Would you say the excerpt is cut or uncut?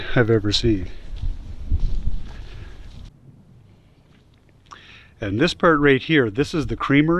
uncut